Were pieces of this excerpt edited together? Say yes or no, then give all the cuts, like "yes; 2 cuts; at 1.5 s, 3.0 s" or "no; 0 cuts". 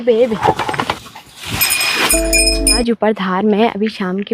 yes; 1 cut; at 2.7 s